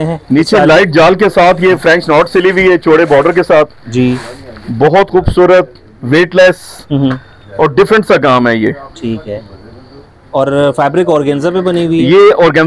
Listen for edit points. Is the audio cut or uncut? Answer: uncut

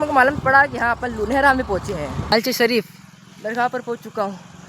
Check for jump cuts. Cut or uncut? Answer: cut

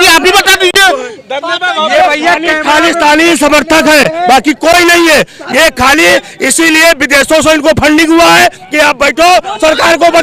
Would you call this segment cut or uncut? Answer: uncut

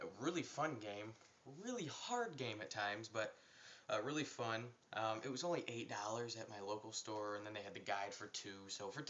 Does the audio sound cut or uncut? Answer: cut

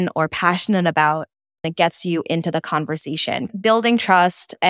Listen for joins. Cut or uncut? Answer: cut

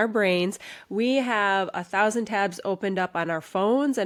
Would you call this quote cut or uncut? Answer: uncut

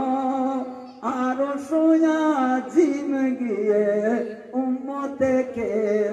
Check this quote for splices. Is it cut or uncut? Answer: uncut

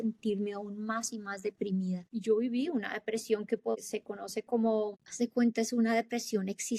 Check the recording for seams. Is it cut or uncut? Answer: uncut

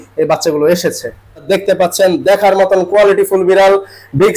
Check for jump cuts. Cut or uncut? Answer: cut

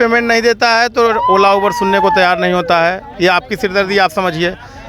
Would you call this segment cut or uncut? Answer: uncut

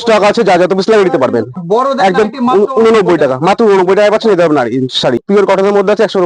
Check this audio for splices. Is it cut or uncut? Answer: cut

